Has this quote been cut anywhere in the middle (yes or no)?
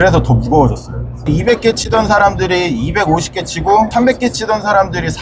yes